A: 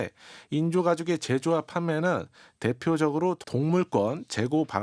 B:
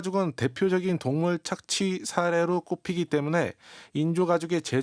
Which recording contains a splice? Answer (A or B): A